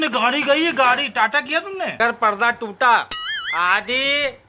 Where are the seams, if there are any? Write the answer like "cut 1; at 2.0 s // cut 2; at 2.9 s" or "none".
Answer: cut 1; at 2.0 s